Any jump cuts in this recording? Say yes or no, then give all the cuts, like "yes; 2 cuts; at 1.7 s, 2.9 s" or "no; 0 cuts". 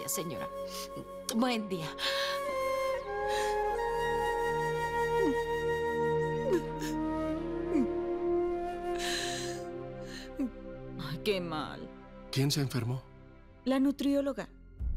no; 0 cuts